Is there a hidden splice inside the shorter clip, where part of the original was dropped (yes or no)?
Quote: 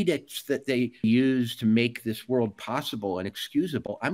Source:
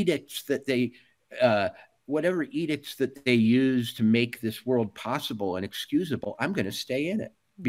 yes